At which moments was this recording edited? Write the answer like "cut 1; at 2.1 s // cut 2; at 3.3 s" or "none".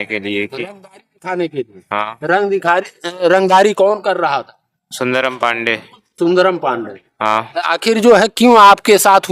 none